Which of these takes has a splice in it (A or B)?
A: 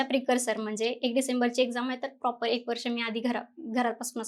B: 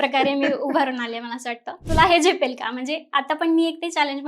B